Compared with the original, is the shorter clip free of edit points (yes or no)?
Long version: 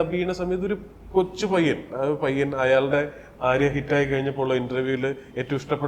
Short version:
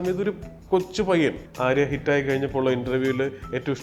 no